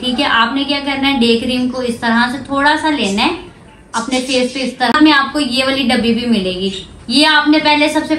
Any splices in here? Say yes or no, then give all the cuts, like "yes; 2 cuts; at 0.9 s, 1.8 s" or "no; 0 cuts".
yes; 1 cut; at 4.9 s